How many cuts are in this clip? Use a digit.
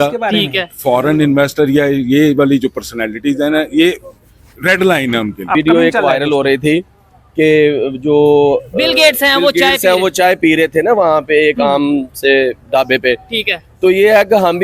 1